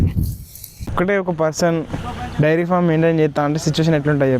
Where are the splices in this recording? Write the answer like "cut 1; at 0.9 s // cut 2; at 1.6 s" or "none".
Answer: cut 1; at 0.9 s